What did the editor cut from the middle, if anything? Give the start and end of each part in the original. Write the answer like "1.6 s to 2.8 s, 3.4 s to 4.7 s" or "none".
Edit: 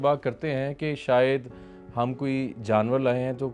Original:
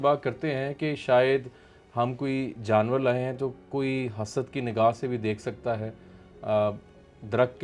none